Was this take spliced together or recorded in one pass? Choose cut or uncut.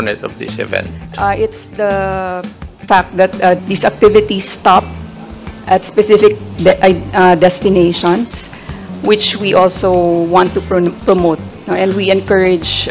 cut